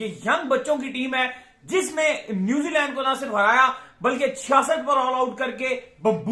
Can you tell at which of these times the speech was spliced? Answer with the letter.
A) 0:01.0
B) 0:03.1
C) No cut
C